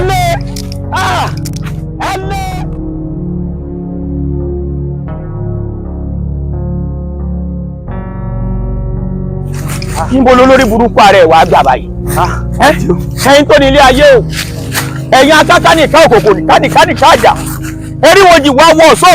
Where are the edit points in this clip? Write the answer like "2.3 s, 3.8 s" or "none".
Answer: none